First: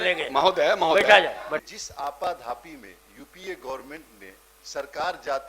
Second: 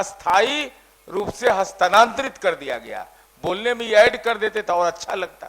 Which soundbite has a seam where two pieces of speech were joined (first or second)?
first